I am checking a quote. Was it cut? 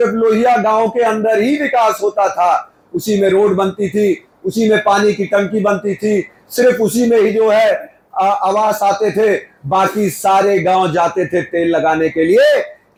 no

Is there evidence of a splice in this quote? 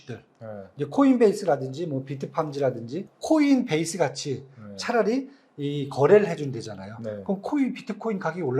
yes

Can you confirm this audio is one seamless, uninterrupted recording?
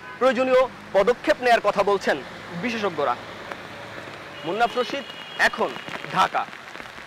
yes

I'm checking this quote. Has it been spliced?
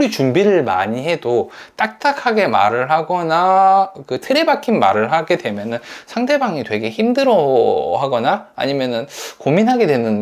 no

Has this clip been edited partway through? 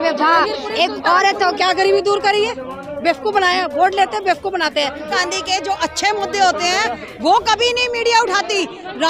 yes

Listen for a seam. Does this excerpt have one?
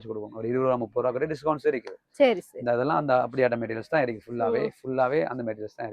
no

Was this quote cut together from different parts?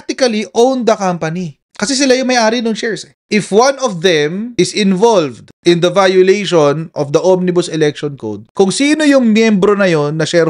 no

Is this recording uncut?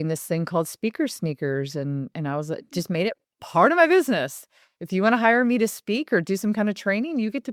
yes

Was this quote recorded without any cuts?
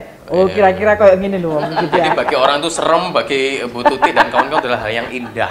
no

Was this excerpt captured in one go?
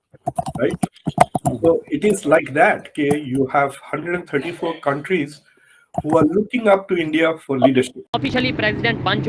no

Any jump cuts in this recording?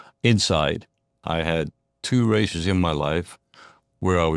yes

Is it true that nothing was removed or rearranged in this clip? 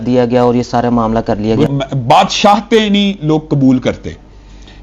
no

